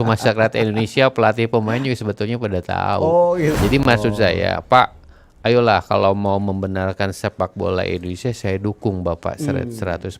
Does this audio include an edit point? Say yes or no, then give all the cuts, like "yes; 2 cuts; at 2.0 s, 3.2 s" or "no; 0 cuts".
yes; 1 cut; at 3.6 s